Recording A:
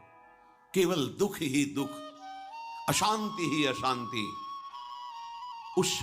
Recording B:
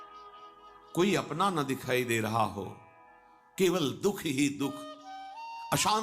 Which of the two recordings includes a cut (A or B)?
B